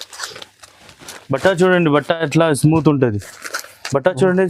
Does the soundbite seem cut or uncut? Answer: uncut